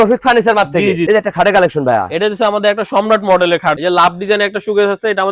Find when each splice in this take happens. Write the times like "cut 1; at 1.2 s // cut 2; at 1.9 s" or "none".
cut 1; at 1.0 s // cut 2; at 3.8 s

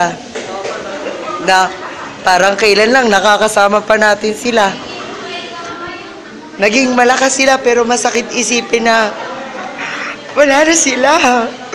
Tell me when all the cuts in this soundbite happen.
cut 1; at 10.3 s

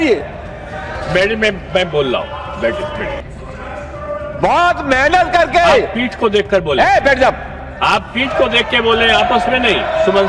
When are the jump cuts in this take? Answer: cut 1; at 3.3 s

